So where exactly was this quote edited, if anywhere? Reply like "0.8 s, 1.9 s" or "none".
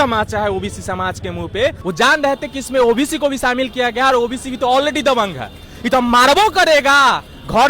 1.8 s